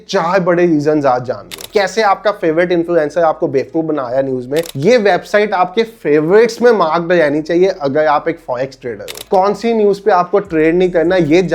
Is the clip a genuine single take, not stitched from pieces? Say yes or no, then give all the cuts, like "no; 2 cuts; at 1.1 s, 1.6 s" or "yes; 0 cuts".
no; 3 cuts; at 1.6 s, 4.7 s, 9.2 s